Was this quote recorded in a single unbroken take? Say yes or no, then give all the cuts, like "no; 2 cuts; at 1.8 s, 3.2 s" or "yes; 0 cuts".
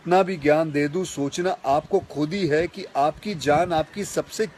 yes; 0 cuts